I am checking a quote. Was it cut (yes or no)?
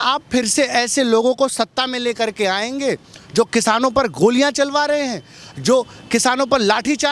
no